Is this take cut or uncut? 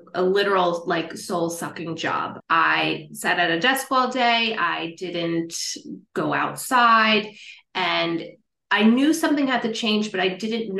uncut